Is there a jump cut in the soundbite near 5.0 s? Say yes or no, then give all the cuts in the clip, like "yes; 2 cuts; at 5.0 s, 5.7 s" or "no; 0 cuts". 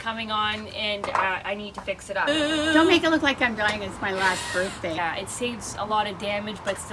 yes; 2 cuts; at 2.3 s, 5.0 s